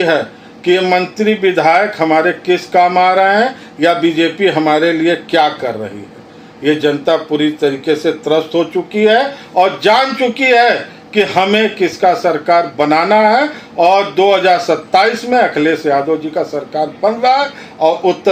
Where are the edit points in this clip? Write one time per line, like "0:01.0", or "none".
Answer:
none